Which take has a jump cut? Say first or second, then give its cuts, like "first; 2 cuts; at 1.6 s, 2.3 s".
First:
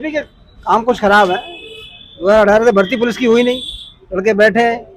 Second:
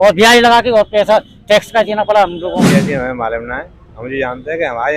second; 1 cut; at 2.7 s